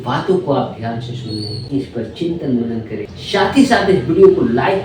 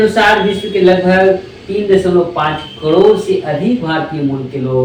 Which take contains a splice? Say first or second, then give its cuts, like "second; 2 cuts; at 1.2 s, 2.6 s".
first; 1 cut; at 1.6 s